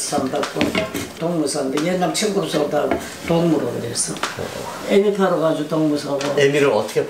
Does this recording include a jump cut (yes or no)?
no